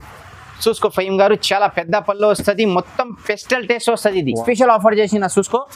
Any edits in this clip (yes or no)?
yes